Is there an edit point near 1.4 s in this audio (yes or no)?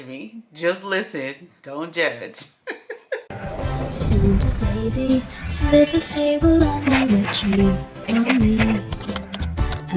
no